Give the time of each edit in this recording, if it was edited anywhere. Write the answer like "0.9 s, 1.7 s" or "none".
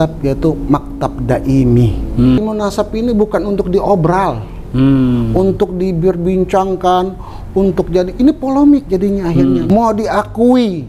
2.4 s, 9.6 s